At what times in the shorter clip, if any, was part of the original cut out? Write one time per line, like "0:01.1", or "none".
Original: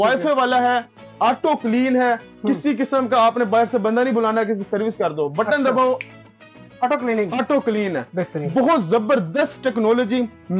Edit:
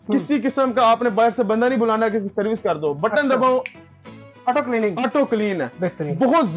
none